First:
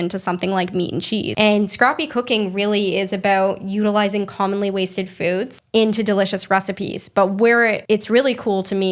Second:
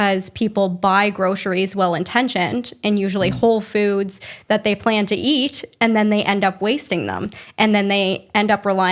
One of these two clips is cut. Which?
first; 3 cuts; at 1.3 s, 5.5 s, 7.8 s

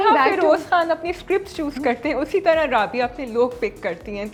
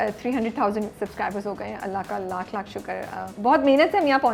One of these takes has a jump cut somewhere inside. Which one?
second; 2 cuts; at 0.9 s, 3.3 s

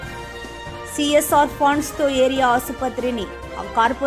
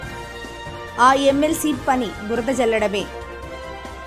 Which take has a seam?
first; 1 cut; at 0.9 s

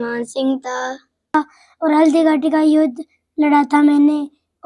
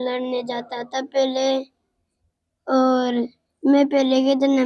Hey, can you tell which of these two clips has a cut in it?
first; 1 cut; at 1.3 s

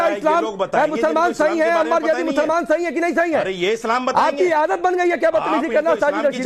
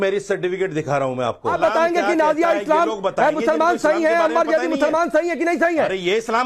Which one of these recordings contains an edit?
second; 1 cut; at 1.5 s

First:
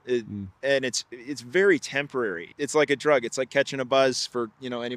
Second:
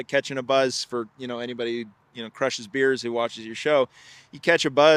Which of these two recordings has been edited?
first; 1 cut; at 2.5 s

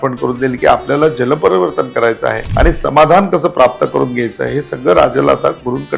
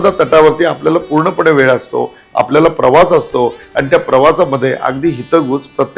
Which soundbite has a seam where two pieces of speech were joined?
first; 1 cut; at 2.4 s

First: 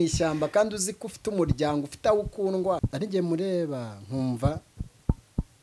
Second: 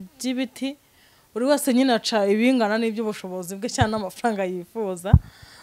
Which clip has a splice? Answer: first; 1 cut; at 2.9 s

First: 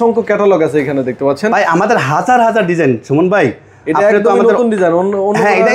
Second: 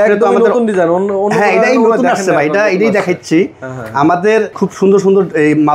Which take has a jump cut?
second; 1 cut; at 4.5 s

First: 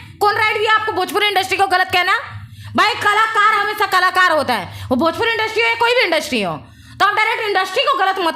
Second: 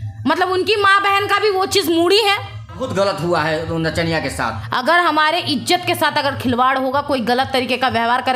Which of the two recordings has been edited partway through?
second; 2 cuts; at 2.8 s, 4.6 s

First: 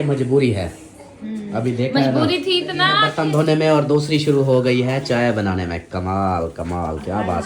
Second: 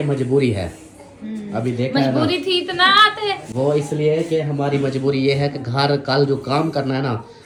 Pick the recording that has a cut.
first; 1 cut; at 3.0 s

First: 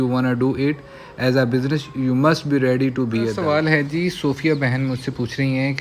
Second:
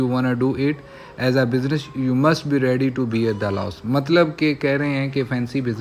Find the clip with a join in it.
first; 1 cut; at 3.4 s

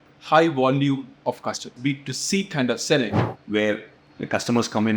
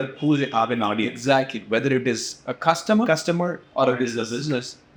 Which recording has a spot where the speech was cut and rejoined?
first; 2 cuts; at 1.7 s, 3.3 s

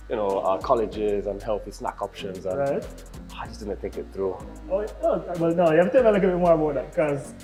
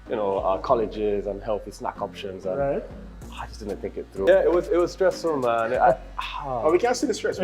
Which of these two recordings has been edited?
second; 1 cut; at 4.3 s

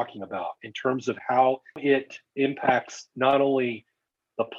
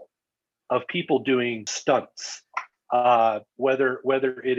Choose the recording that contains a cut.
second; 1 cut; at 1.7 s

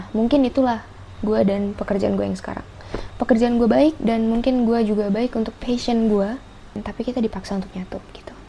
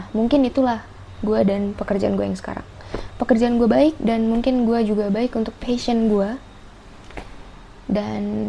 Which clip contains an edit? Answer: first; 1 cut; at 6.8 s

